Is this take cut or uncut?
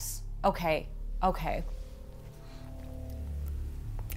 uncut